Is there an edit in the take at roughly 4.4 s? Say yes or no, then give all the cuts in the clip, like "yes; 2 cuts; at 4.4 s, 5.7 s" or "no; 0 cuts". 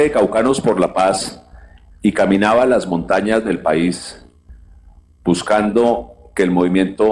no; 0 cuts